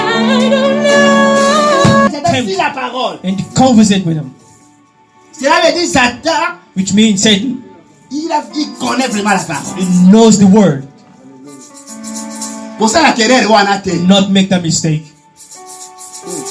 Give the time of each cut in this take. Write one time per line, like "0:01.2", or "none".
0:02.1